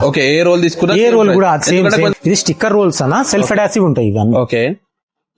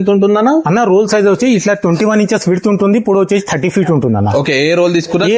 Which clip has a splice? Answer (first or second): first